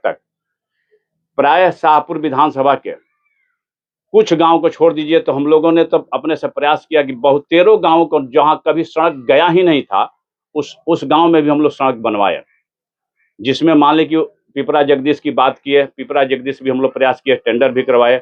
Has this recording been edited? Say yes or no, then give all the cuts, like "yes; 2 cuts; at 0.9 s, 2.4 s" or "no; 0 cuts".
no; 0 cuts